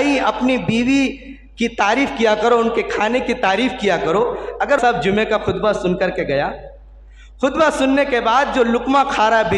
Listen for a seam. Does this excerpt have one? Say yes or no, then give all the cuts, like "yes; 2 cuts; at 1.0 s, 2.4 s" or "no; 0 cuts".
yes; 1 cut; at 4.8 s